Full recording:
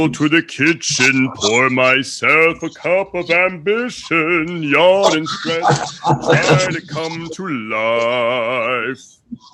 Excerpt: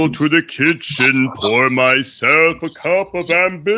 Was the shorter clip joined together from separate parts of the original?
no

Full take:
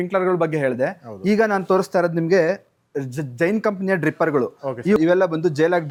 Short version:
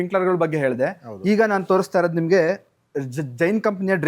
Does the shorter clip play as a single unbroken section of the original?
yes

